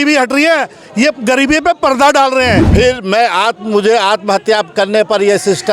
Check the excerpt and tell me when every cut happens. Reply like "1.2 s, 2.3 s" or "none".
2.7 s